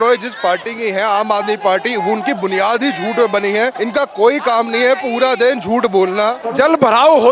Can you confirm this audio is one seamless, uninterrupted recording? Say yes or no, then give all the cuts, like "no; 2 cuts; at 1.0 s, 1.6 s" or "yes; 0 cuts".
no; 2 cuts; at 3.8 s, 6.4 s